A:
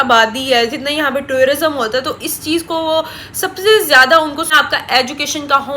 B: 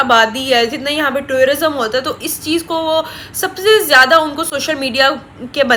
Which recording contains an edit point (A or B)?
A